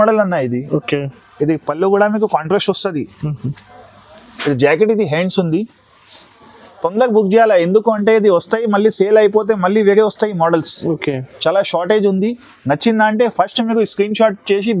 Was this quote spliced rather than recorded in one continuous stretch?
no; 0 cuts

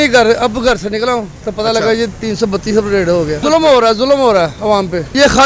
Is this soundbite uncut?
yes; 0 cuts

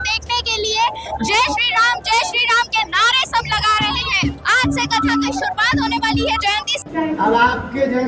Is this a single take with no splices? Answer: no; 2 cuts; at 4.5 s, 6.8 s

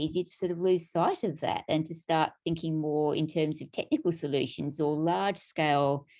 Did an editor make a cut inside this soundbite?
no; 0 cuts

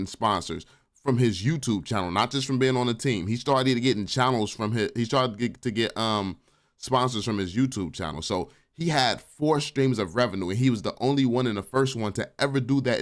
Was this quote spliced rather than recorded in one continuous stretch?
no; 0 cuts

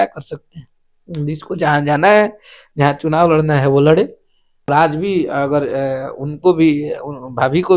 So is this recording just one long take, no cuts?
no; 1 cut; at 4.7 s

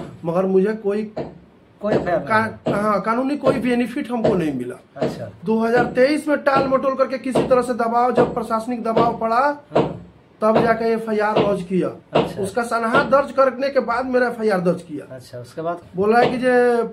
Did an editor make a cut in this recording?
yes; 2 cuts; at 5.3 s, 15.8 s

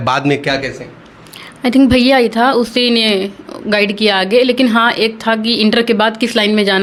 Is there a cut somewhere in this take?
no; 0 cuts

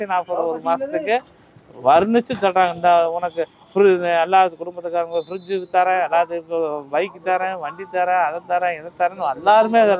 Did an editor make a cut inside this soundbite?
no; 0 cuts

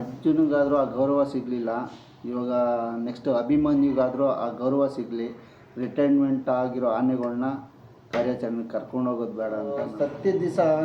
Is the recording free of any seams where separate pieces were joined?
no; 1 cut; at 9.9 s

